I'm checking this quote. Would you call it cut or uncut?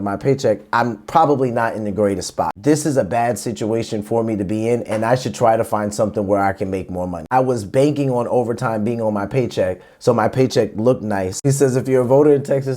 cut